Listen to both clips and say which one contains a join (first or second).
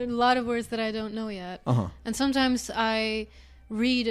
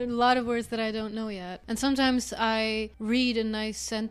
second